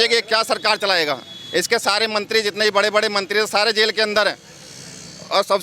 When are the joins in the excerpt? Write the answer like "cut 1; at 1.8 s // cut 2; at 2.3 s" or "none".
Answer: none

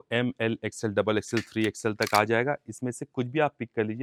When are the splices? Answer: none

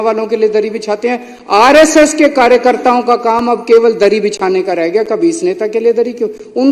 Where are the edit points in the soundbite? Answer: none

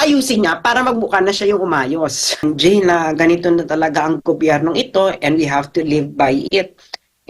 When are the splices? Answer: cut 1; at 2.4 s

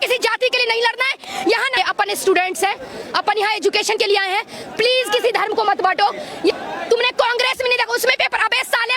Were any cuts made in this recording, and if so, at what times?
cut 1; at 1.8 s // cut 2; at 6.6 s

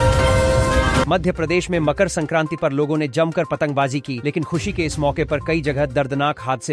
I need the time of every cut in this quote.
cut 1; at 1.1 s

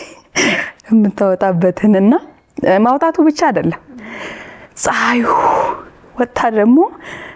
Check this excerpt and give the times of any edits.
none

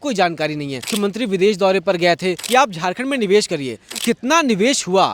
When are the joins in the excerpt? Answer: cut 1; at 0.9 s // cut 2; at 2.4 s // cut 3; at 3.8 s

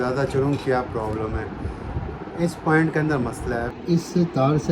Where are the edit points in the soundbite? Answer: cut 1; at 3.7 s

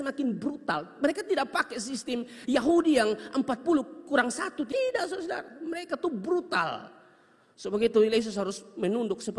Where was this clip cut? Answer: cut 1; at 4.7 s

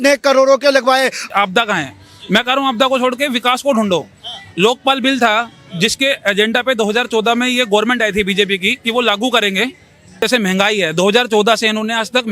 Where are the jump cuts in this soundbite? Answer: cut 1; at 1.2 s // cut 2; at 10.2 s

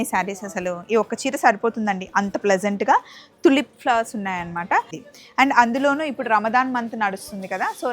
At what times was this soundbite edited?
cut 1; at 5.0 s

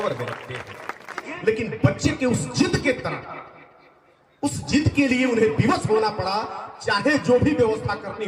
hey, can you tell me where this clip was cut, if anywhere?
cut 1; at 1.3 s

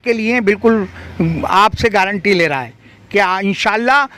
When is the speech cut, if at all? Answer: none

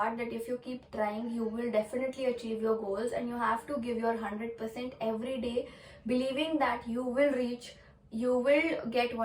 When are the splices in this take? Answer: none

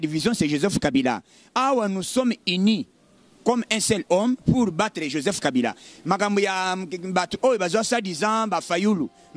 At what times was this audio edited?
none

